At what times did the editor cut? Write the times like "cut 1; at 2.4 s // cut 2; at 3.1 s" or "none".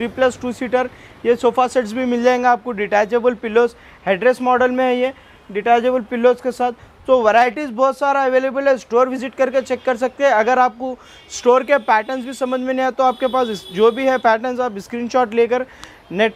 none